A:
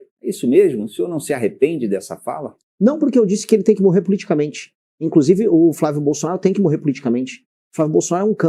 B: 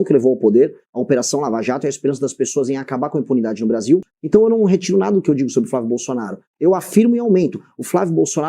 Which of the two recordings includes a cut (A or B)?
B